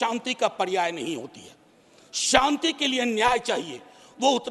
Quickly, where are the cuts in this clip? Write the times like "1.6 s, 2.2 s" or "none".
none